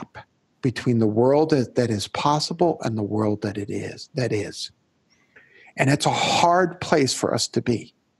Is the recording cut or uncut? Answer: uncut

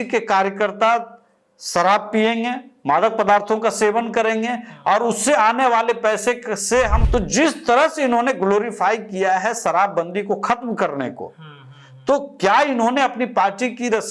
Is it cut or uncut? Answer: cut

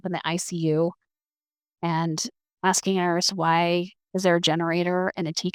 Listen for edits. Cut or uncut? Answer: uncut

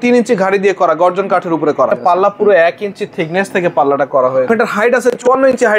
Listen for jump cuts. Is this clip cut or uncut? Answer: cut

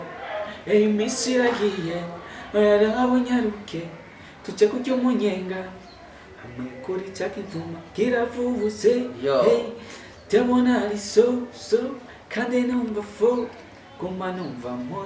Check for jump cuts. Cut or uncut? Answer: uncut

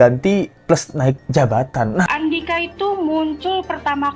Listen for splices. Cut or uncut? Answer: cut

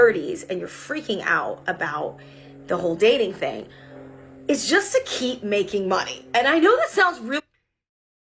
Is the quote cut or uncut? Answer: uncut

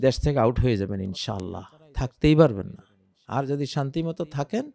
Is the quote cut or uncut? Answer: uncut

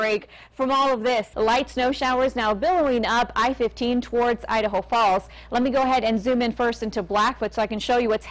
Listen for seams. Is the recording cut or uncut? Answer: cut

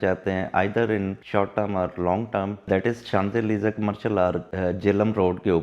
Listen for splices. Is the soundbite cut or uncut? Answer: cut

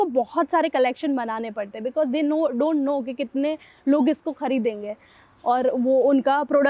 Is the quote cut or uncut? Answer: uncut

